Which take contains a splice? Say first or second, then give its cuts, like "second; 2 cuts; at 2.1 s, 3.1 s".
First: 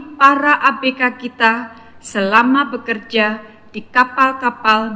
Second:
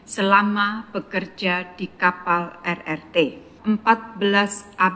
second; 1 cut; at 3.5 s